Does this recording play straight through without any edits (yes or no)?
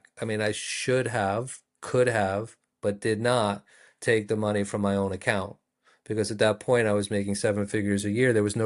yes